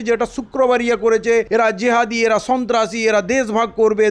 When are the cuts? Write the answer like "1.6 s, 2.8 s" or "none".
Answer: 1.5 s